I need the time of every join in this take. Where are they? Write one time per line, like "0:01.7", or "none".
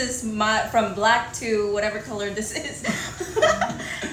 none